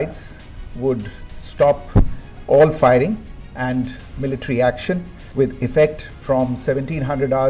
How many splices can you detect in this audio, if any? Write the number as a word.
one